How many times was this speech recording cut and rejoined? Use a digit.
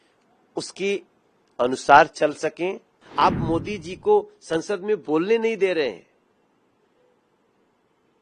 1